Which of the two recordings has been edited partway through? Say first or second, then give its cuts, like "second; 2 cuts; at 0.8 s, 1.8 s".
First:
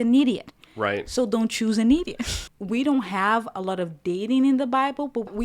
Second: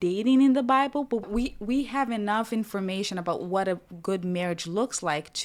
first; 1 cut; at 2.4 s